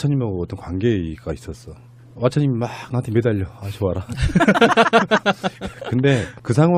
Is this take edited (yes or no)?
no